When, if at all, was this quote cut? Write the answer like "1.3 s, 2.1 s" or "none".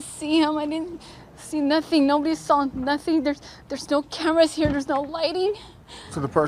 5.4 s